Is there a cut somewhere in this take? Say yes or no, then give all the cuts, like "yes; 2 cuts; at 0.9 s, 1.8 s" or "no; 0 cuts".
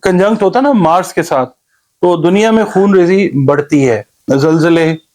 yes; 1 cut; at 4.1 s